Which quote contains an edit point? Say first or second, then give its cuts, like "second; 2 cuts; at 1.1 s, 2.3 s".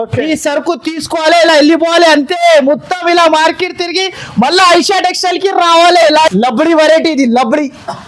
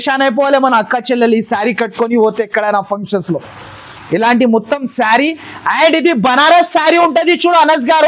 first; 1 cut; at 6.3 s